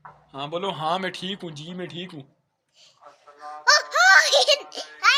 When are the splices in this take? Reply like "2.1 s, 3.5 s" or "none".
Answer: none